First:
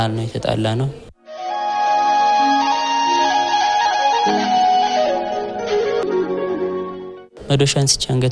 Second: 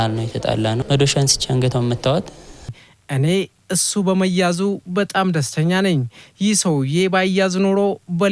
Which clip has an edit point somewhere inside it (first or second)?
second